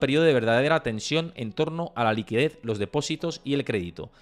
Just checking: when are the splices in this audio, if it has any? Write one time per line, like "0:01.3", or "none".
none